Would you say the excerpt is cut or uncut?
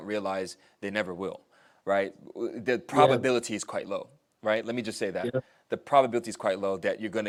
uncut